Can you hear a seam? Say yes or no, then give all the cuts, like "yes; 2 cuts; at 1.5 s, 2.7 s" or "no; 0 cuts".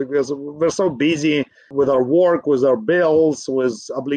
no; 0 cuts